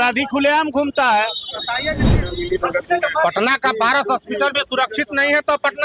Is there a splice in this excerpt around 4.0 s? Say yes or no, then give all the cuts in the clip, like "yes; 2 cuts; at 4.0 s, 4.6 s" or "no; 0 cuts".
no; 1 cut; at 2.0 s